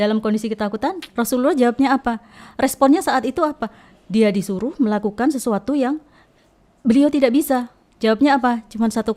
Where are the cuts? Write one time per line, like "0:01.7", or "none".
none